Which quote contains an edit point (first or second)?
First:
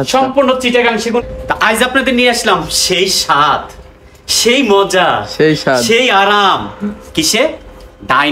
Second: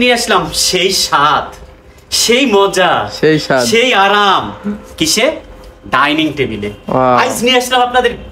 first